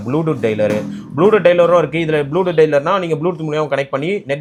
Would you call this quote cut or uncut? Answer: uncut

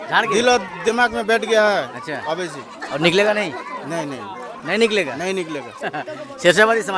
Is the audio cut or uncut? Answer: uncut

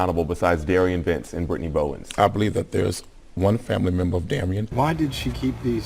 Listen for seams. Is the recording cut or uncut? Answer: cut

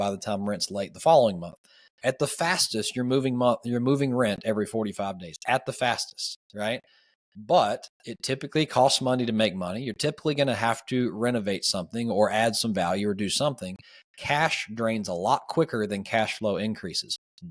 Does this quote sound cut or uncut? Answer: uncut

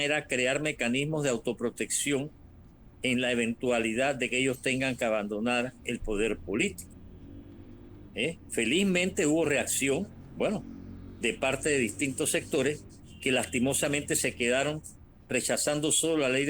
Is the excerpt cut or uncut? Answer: uncut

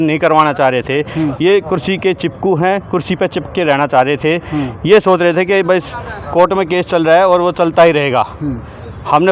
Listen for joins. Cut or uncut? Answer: uncut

